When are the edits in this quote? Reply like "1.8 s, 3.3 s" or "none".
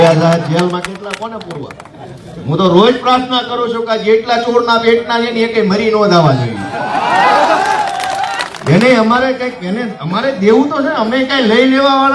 none